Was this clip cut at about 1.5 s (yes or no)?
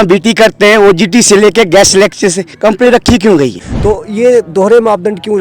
no